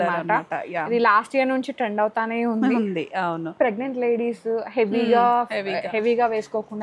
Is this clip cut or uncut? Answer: cut